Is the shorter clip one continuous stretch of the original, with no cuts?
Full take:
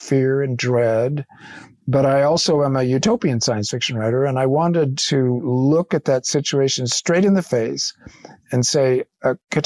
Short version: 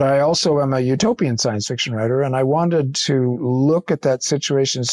yes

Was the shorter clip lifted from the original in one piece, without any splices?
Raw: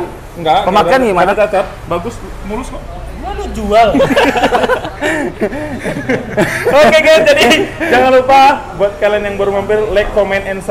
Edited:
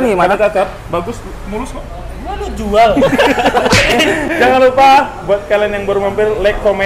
no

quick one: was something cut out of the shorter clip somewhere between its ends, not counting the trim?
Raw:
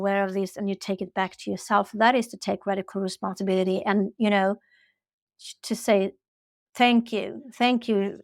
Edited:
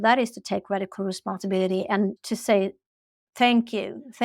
yes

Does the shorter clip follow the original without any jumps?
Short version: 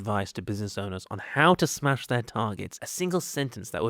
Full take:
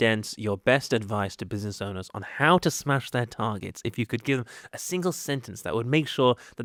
no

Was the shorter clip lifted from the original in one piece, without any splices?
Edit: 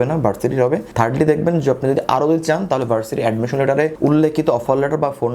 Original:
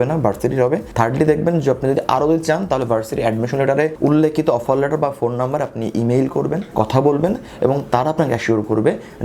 yes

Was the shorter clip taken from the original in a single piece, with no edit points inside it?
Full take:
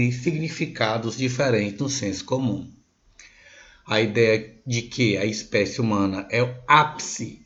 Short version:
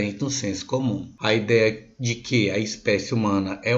no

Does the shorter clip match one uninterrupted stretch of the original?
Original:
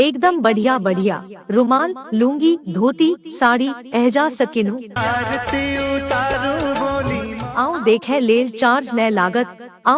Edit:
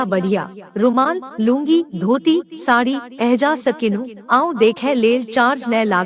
no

